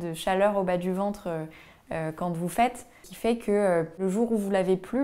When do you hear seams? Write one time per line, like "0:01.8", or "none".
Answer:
0:03.1
0:04.0